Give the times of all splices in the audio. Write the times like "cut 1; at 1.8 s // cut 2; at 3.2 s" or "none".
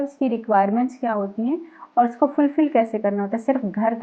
none